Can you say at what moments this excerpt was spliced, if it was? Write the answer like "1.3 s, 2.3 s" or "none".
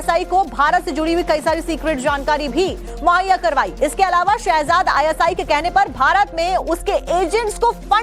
none